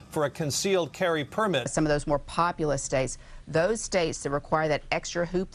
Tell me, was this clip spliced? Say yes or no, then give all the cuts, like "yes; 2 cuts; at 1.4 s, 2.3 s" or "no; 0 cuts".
yes; 1 cut; at 1.6 s